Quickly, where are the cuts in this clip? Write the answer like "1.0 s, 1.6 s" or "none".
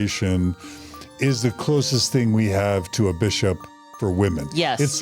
3.9 s